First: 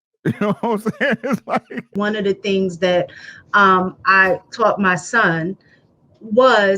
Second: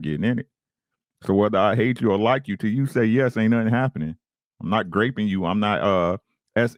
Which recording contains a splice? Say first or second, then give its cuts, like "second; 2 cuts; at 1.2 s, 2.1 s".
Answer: first; 1 cut; at 1.9 s